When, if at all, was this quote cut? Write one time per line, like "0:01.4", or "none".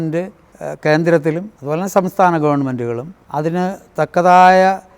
0:01.5
0:03.1